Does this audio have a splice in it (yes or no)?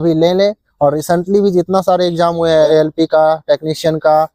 yes